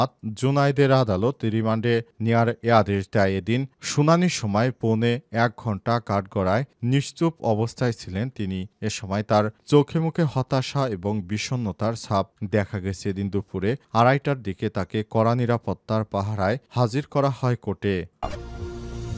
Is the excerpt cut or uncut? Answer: cut